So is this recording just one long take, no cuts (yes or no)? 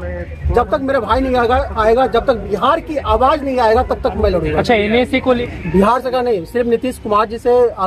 no